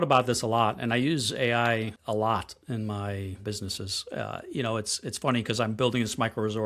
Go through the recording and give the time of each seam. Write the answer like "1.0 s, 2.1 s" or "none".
2.0 s, 3.4 s